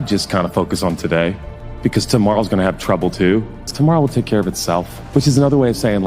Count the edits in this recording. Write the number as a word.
two